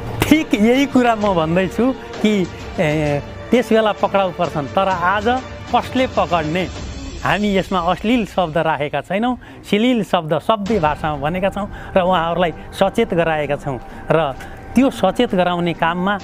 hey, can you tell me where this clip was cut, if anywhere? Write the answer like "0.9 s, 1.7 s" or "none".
none